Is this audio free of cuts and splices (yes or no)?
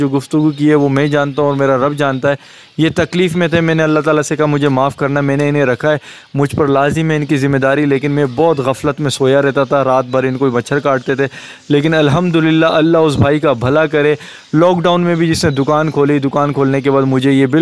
yes